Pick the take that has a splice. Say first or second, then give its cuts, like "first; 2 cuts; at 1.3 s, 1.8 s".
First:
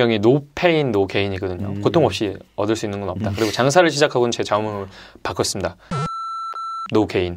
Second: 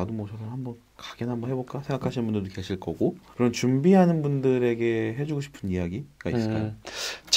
second; 1 cut; at 3.2 s